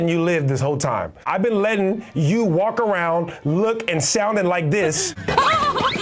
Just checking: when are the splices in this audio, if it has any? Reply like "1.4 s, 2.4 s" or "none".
none